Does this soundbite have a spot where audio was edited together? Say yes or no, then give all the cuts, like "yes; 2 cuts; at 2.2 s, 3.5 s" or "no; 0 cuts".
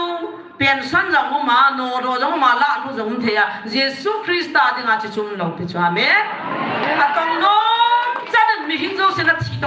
no; 0 cuts